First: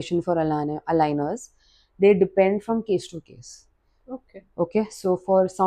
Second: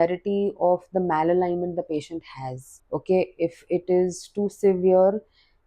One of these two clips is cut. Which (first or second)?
second